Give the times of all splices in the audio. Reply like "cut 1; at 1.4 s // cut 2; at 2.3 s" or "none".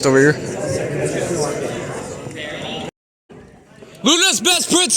cut 1; at 3.1 s